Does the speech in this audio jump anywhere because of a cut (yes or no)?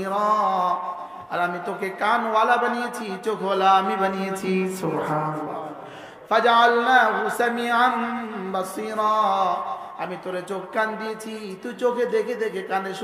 yes